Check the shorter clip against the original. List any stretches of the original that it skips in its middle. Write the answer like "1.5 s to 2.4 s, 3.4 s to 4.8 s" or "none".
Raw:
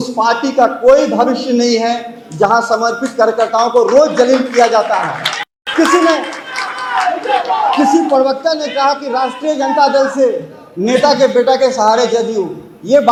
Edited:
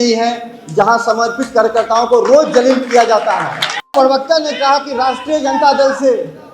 5.6 s to 8.1 s